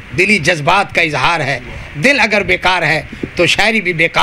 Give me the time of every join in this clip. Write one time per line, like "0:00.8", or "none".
none